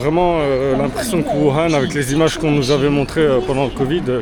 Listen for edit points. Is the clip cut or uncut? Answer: uncut